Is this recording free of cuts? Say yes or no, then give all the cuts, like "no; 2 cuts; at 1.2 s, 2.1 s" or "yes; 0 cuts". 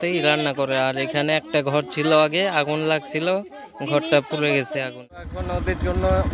yes; 0 cuts